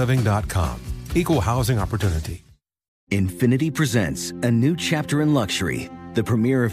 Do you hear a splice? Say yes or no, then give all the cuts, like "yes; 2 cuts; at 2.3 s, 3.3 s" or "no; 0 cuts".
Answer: yes; 1 cut; at 2.9 s